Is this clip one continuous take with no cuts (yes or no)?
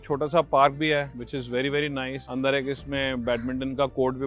no